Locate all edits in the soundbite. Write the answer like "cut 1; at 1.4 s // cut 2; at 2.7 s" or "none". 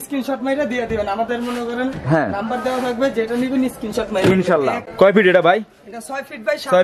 cut 1; at 4.9 s